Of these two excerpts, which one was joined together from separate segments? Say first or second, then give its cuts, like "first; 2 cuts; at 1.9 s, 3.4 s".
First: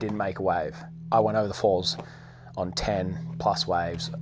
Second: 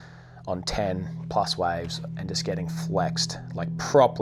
first; 1 cut; at 0.9 s